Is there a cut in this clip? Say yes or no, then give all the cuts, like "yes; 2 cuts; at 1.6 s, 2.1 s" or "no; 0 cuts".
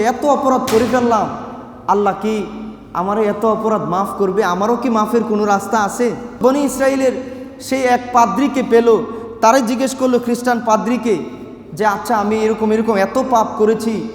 yes; 1 cut; at 6.4 s